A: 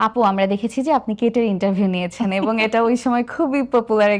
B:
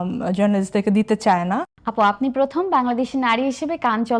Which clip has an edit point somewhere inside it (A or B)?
B